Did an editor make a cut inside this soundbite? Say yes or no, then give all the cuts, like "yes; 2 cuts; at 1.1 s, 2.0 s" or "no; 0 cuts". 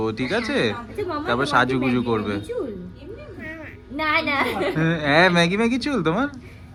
no; 0 cuts